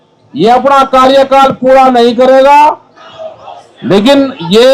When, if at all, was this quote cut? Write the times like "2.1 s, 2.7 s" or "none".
3.1 s